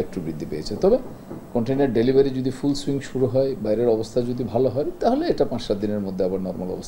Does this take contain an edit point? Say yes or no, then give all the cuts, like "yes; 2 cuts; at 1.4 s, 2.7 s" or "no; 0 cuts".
no; 0 cuts